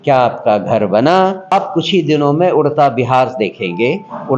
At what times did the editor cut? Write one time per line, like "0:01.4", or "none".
0:01.5